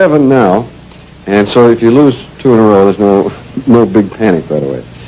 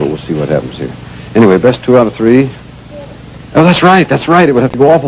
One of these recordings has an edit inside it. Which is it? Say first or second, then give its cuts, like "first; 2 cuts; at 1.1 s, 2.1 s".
second; 1 cut; at 3.9 s